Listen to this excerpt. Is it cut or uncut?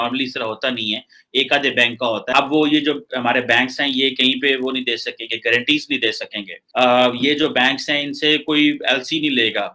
cut